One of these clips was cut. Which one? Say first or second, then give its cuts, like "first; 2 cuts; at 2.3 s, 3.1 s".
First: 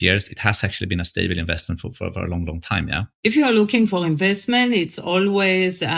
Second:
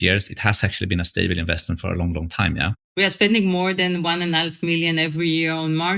second; 2 cuts; at 1.8 s, 2.8 s